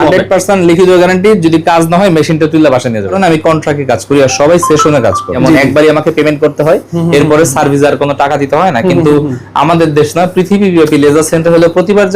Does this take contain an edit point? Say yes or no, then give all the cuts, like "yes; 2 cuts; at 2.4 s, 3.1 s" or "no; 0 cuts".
yes; 2 cuts; at 3.2 s, 5.3 s